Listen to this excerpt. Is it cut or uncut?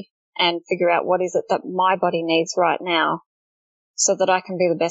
uncut